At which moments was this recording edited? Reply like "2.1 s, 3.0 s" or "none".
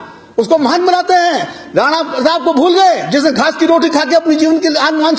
none